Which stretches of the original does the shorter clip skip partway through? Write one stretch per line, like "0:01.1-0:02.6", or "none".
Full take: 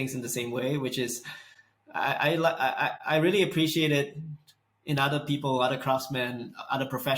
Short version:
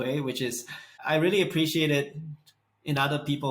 0:01.5-0:03.0